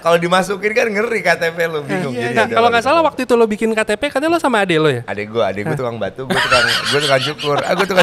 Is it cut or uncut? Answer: uncut